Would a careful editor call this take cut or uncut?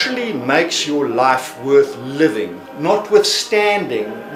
uncut